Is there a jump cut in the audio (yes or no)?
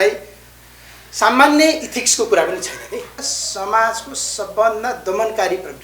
yes